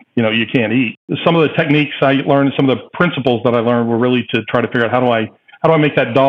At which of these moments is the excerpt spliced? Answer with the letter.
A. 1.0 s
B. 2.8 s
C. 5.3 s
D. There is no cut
A